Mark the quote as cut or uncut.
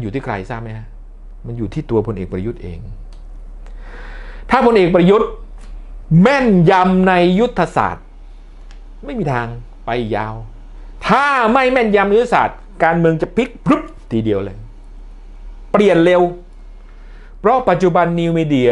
uncut